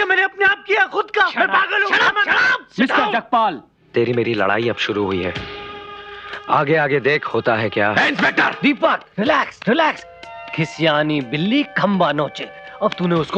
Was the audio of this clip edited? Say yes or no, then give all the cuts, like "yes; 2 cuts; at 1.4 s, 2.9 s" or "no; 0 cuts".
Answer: yes; 1 cut; at 3.7 s